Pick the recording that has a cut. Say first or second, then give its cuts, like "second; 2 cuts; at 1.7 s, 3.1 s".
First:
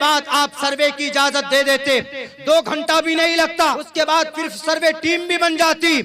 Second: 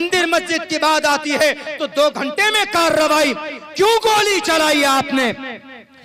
first; 1 cut; at 3.8 s